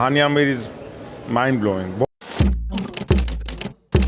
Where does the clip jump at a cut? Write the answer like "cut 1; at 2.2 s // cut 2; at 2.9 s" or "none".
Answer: cut 1; at 2.0 s

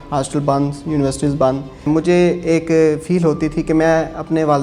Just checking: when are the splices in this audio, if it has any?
cut 1; at 1.8 s

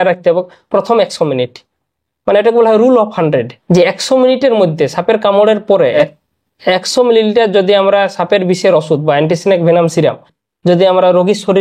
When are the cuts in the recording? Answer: cut 1; at 3.6 s // cut 2; at 6.0 s

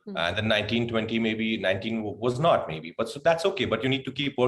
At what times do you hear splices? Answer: none

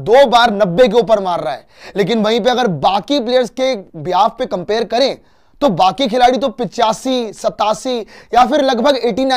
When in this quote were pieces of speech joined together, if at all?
none

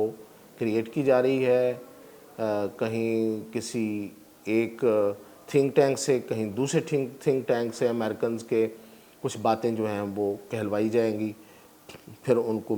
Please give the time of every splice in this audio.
none

